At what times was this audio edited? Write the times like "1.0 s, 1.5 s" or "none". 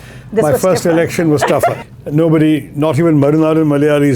1.8 s